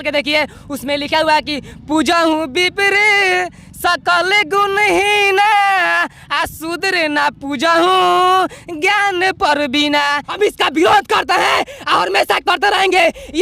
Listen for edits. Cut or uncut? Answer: cut